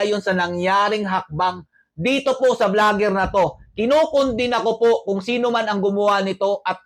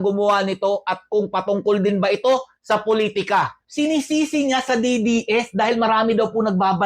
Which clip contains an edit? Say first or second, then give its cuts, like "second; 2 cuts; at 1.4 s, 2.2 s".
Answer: second; 1 cut; at 3.6 s